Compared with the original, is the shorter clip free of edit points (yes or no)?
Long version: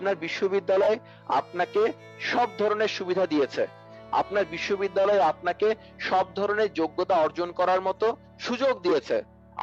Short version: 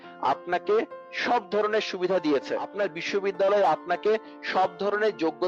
no